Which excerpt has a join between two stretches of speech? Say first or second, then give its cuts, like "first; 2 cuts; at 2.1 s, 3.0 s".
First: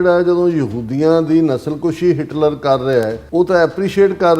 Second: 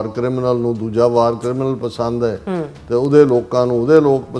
first; 1 cut; at 3.2 s